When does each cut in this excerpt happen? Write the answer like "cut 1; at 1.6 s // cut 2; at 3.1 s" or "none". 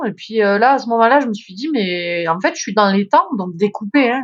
none